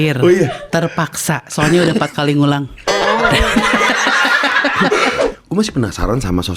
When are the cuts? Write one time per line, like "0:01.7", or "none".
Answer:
0:05.2